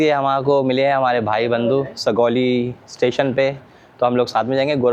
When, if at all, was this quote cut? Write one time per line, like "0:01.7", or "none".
none